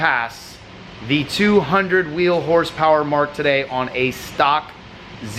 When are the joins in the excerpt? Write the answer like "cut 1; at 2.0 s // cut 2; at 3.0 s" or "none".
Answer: none